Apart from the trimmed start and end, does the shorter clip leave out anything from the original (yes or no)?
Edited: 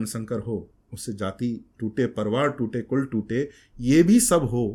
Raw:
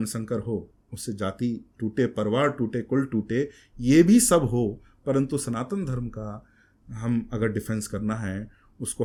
no